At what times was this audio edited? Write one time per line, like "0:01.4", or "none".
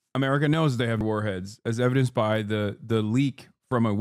0:01.0